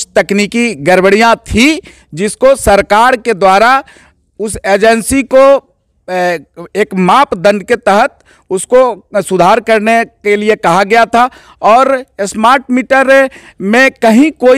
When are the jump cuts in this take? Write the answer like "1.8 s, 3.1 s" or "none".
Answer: none